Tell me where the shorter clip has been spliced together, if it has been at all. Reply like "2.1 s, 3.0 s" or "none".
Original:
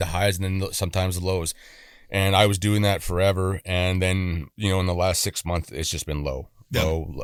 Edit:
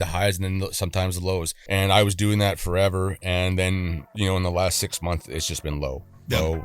1.6 s